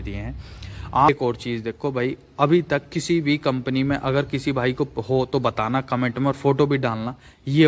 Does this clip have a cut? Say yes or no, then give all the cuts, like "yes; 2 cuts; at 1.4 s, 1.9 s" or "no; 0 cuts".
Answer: yes; 1 cut; at 1.1 s